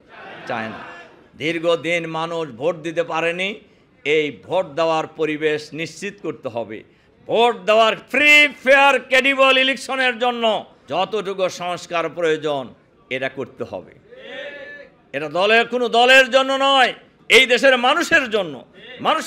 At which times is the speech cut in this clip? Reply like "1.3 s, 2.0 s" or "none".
10.8 s